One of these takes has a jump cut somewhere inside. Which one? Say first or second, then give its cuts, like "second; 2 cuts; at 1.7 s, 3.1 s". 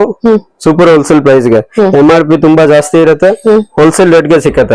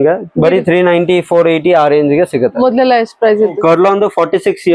second; 1 cut; at 3.6 s